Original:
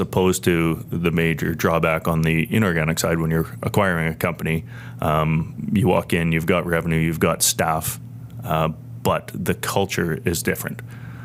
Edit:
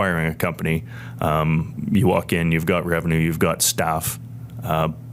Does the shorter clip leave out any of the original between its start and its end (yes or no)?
no